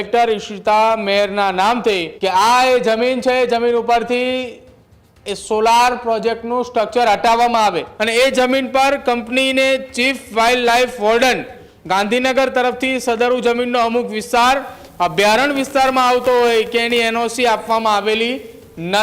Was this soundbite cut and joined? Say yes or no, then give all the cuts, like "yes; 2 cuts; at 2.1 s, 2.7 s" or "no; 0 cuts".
yes; 2 cuts; at 2.1 s, 7.9 s